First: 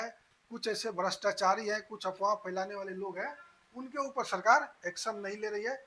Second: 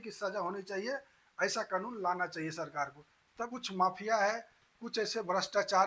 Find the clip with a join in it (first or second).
second